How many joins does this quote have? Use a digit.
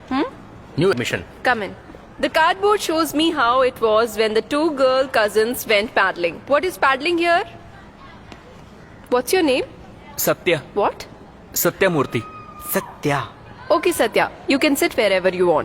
1